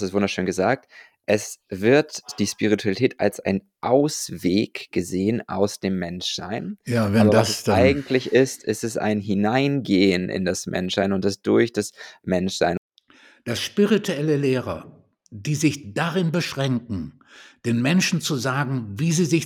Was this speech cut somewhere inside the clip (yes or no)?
yes